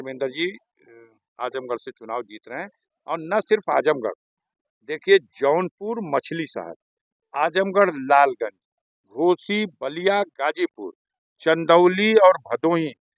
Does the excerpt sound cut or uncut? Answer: uncut